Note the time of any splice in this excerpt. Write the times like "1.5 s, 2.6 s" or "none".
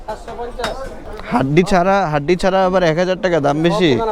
1.0 s